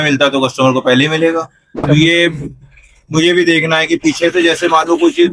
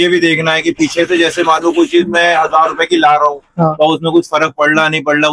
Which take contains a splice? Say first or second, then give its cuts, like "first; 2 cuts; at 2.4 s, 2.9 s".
first; 1 cut; at 1.9 s